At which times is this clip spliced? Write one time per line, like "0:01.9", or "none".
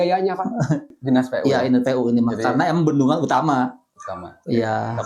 0:00.9